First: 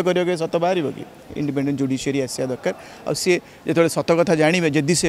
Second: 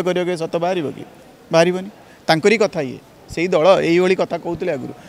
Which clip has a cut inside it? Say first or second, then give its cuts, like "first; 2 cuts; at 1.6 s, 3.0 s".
first; 1 cut; at 1.3 s